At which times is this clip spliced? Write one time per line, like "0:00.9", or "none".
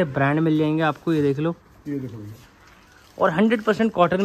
none